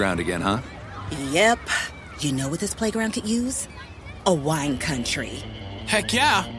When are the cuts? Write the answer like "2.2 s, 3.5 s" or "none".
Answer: none